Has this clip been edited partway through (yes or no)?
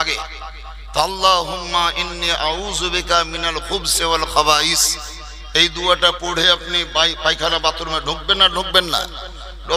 no